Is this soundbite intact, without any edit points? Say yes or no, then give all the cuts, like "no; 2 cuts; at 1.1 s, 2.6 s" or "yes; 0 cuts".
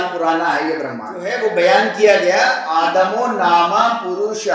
no; 1 cut; at 1.4 s